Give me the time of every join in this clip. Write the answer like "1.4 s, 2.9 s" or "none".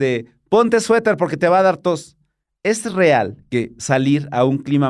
none